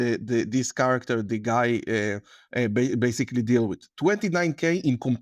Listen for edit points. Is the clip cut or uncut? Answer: uncut